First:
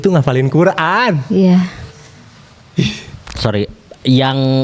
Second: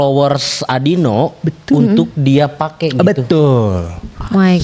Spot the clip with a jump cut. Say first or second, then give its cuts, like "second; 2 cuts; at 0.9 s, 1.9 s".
first; 1 cut; at 3.4 s